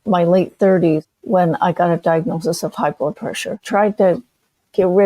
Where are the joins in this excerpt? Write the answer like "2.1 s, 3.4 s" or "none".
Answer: 1.1 s, 3.5 s